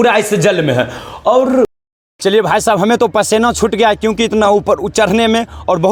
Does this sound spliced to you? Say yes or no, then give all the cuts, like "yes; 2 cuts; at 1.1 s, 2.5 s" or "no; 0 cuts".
no; 0 cuts